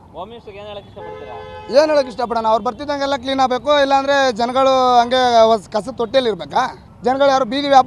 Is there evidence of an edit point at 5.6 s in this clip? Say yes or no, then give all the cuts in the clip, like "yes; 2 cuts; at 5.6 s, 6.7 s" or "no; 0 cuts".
no; 1 cut; at 6.9 s